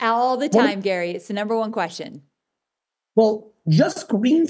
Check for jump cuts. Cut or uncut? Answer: uncut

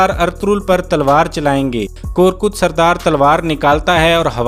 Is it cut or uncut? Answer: cut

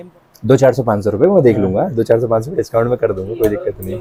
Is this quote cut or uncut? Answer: uncut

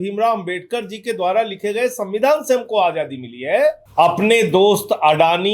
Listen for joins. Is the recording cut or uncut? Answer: cut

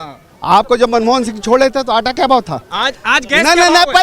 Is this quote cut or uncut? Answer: cut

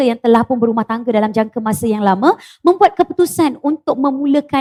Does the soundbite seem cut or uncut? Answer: uncut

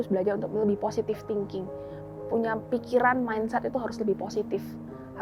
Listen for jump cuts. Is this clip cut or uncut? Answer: uncut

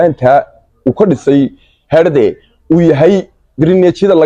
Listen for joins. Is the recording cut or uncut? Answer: uncut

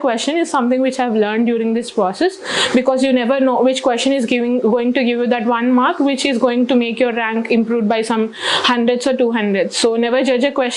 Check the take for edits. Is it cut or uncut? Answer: uncut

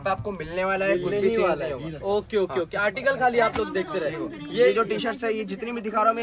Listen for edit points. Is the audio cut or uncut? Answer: uncut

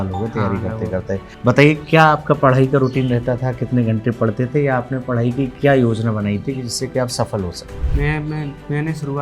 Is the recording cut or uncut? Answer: cut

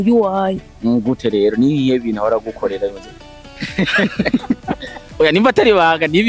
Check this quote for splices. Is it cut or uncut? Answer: uncut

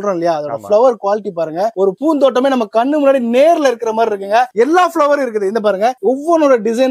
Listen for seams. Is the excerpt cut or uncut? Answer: uncut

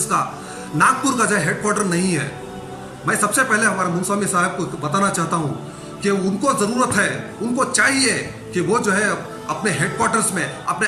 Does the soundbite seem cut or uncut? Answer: uncut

